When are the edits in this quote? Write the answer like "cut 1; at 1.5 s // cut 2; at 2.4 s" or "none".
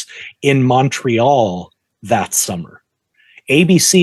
none